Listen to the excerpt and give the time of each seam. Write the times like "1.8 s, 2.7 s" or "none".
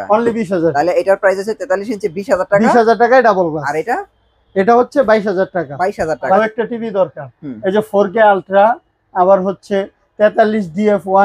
6.4 s